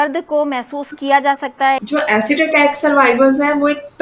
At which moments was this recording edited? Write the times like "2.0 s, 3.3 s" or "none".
1.8 s